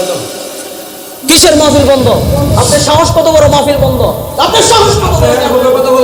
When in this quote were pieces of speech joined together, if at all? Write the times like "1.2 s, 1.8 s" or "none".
none